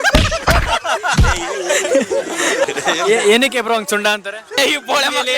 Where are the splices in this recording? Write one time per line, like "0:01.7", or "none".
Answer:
0:02.6
0:04.6